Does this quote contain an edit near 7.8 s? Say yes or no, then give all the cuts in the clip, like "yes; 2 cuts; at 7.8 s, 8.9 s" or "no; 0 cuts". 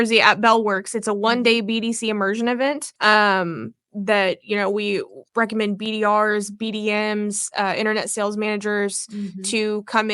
no; 2 cuts; at 2.9 s, 5.2 s